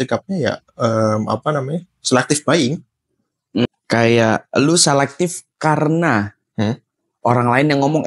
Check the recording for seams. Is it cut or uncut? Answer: cut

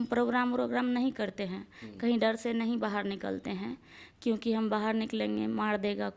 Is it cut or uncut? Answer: uncut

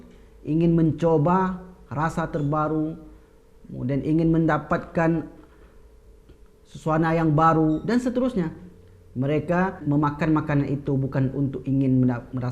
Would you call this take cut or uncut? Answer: cut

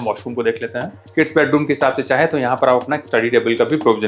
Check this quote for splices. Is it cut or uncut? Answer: cut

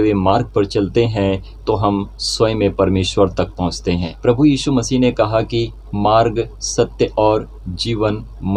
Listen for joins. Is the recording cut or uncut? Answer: cut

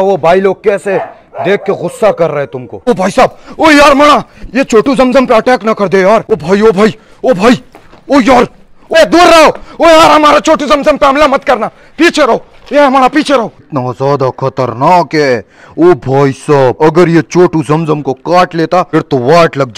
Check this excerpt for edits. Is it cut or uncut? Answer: cut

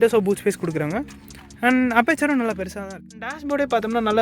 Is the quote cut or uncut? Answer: cut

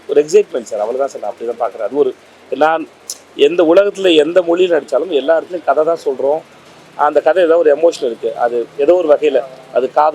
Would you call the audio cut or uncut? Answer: uncut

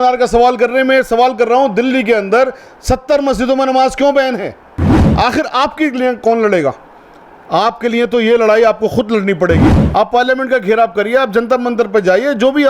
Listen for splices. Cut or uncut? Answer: cut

